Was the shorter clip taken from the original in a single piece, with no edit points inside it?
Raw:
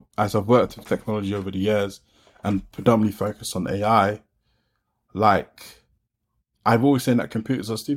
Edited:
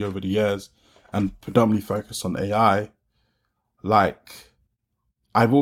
yes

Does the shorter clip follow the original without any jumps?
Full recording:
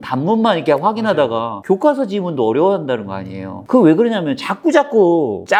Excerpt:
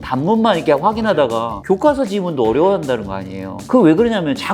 yes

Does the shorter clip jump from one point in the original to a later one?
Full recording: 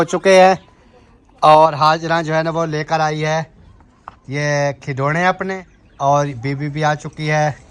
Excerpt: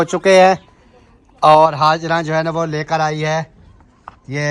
no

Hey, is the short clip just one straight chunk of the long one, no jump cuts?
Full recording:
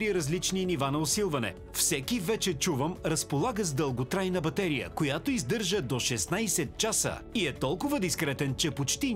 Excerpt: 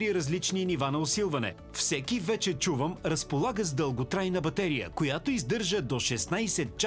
yes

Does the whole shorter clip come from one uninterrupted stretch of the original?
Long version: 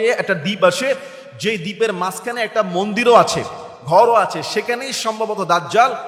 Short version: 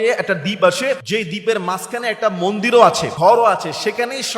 no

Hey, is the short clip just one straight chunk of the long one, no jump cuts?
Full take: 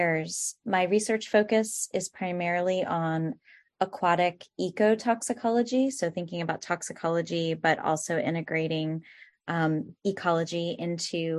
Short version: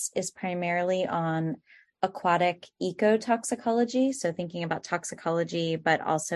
yes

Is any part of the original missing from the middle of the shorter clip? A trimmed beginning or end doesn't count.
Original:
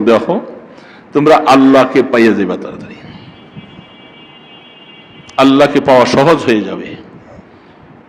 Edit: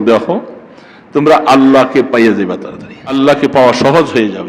yes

